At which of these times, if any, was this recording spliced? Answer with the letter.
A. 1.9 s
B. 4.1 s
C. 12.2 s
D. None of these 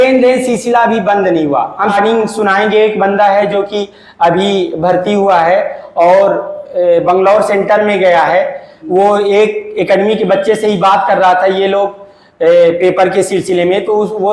A